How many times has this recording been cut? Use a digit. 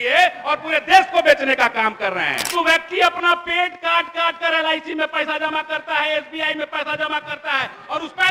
1